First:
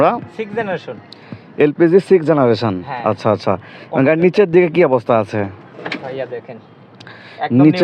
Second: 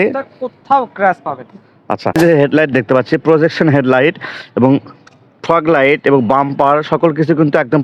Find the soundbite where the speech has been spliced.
second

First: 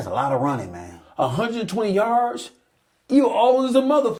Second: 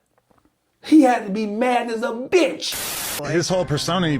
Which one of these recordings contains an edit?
second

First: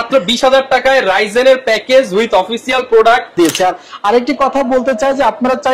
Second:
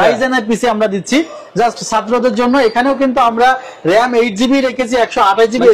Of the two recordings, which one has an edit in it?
first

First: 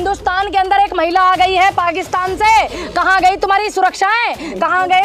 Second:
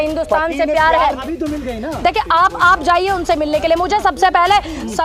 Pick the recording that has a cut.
second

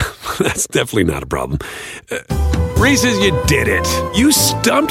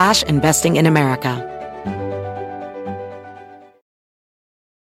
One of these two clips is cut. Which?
second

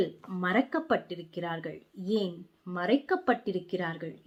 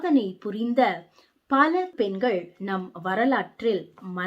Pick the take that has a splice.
second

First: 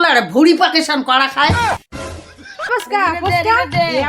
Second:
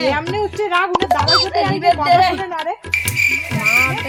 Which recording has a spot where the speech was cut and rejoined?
first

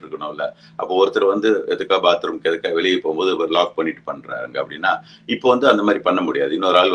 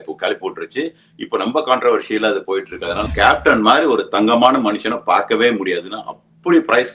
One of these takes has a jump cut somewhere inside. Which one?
second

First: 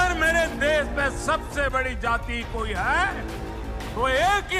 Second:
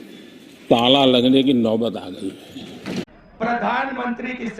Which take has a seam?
second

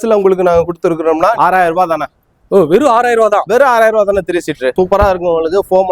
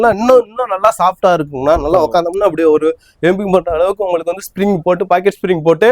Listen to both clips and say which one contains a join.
first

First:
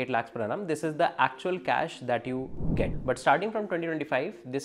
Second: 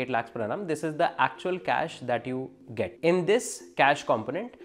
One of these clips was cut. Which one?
first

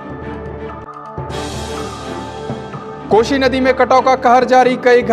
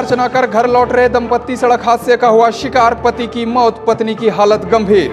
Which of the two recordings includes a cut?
first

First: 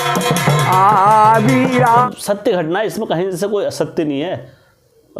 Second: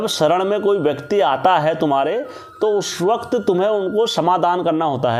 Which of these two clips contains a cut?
first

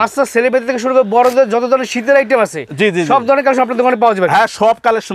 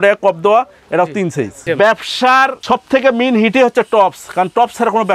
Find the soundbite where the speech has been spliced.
second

